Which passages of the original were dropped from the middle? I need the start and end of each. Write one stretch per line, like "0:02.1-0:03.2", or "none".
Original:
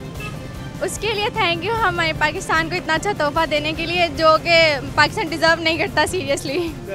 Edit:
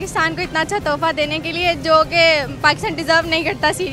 none